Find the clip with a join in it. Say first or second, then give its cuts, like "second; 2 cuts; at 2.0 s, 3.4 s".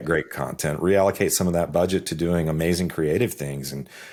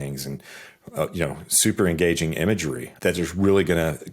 second; 1 cut; at 2.8 s